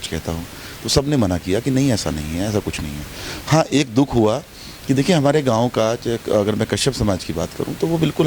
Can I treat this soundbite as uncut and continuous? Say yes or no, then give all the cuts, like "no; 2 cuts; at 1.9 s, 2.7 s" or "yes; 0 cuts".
yes; 0 cuts